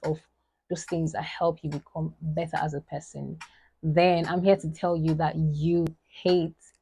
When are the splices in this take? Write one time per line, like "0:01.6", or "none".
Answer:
0:05.9